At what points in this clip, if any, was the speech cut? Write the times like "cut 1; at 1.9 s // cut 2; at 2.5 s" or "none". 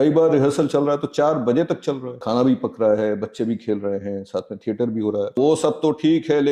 cut 1; at 2.2 s // cut 2; at 5.3 s